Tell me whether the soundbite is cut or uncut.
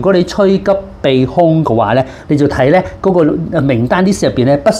uncut